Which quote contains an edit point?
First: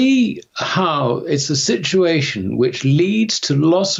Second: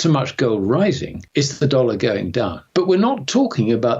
second; 2 cuts; at 1.1 s, 2.6 s

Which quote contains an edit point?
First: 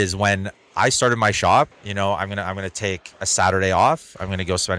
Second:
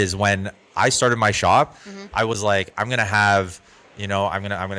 first; 1 cut; at 1.8 s

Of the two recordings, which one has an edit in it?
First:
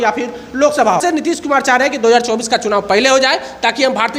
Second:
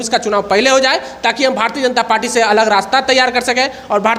first; 1 cut; at 1.0 s

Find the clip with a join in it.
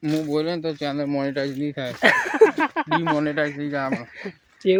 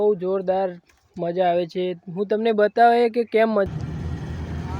second; 1 cut; at 3.7 s

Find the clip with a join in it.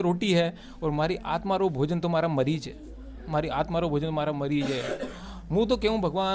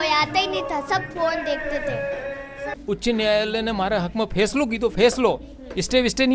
second; 1 cut; at 2.7 s

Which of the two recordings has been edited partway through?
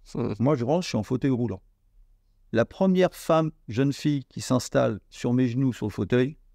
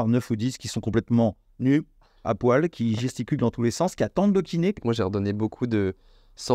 second; 1 cut; at 4.8 s

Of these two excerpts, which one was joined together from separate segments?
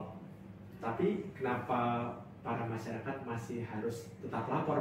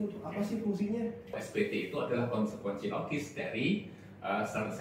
second; 1 cut; at 1.4 s

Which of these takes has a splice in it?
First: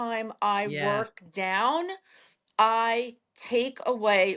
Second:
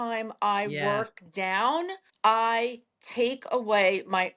second; 1 cut; at 2.1 s

